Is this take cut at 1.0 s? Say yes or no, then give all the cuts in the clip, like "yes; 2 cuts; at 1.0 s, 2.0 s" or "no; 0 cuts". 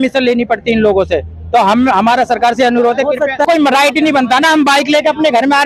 no; 1 cut; at 3.4 s